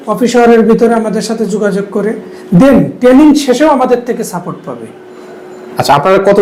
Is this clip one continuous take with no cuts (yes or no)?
yes